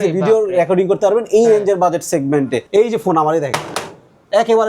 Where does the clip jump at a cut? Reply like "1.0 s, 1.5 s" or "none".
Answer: 2.6 s